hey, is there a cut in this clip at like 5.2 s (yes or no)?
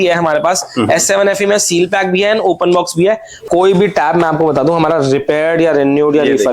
no